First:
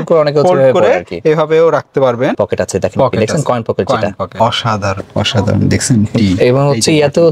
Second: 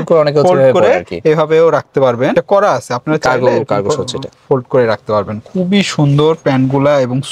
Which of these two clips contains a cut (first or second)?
first